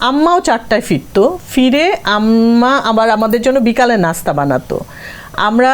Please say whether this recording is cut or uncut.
uncut